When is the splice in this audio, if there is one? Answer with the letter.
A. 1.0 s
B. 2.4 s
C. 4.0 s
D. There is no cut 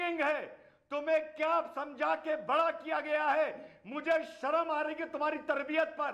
D